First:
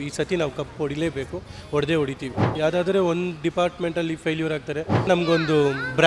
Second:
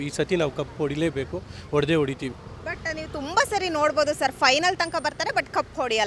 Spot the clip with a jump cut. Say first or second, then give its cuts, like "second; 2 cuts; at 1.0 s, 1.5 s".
first; 2 cuts; at 2.5 s, 5.1 s